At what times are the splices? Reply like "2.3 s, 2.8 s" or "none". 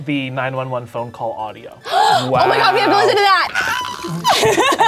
none